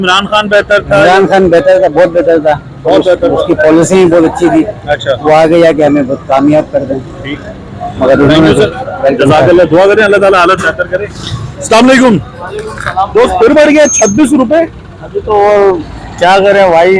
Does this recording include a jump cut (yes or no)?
no